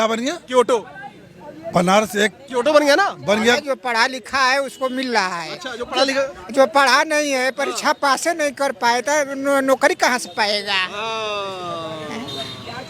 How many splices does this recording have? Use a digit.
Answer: 1